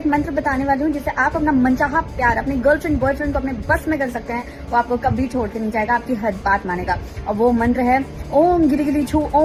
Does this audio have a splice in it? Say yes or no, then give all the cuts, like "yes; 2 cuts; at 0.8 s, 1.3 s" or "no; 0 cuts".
no; 0 cuts